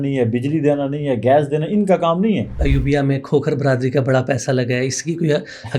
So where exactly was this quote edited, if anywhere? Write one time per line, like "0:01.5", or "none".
0:02.6